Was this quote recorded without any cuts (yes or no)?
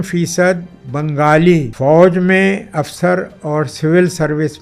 no